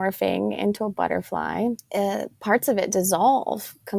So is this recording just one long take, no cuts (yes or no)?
no